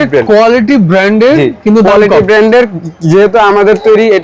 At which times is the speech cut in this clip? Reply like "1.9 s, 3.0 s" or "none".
none